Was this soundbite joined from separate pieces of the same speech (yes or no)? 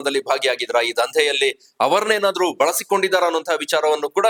no